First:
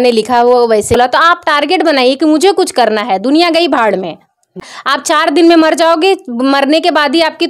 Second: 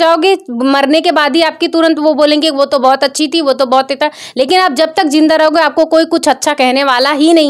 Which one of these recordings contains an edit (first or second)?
first